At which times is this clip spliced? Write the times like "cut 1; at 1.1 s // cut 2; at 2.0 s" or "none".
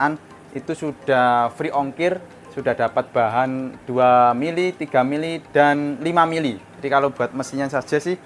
cut 1; at 6.7 s